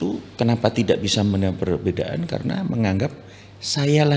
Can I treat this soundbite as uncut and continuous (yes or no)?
yes